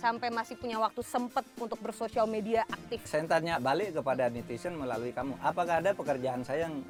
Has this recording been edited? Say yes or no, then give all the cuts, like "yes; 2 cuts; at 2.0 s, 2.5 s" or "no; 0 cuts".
no; 0 cuts